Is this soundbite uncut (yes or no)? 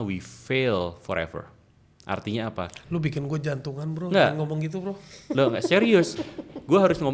yes